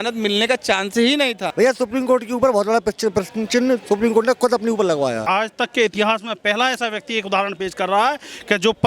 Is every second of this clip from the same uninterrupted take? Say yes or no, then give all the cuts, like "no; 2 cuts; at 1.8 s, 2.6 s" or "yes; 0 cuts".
no; 2 cuts; at 1.4 s, 5.2 s